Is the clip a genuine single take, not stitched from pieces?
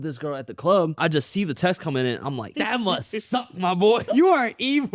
no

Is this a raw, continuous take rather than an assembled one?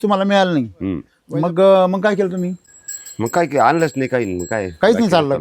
yes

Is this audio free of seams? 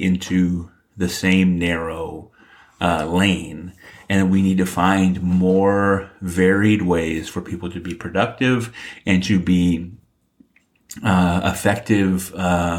no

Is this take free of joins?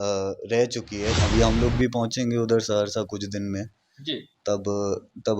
no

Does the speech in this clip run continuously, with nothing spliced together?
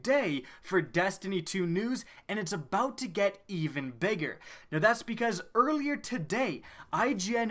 yes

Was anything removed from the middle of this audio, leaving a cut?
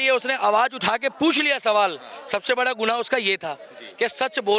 no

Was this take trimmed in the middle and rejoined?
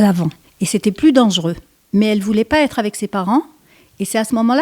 yes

